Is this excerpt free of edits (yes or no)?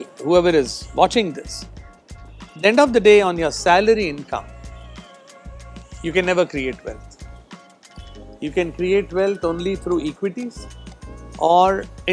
yes